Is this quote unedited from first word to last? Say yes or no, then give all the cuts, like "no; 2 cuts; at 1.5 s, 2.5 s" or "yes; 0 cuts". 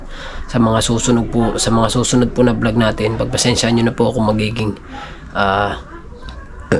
yes; 0 cuts